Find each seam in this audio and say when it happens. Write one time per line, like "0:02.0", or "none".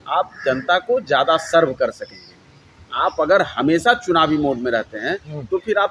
none